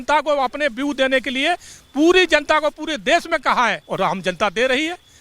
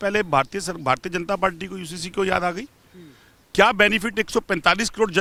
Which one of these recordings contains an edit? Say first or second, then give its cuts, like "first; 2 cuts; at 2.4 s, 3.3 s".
first; 1 cut; at 3.8 s